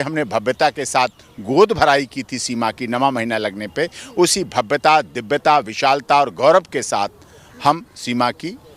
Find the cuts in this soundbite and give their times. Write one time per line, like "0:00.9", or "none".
none